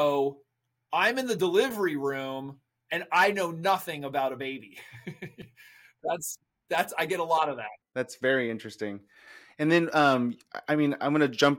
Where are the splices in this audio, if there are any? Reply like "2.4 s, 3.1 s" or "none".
none